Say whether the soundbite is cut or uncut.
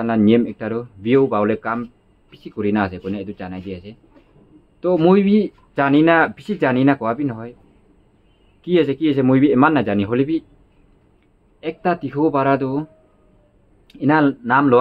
uncut